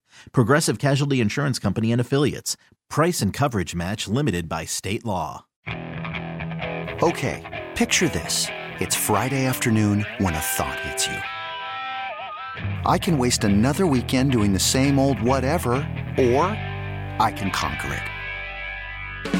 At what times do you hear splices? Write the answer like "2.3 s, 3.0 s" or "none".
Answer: 5.6 s

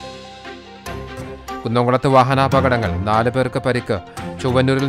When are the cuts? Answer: 1.2 s

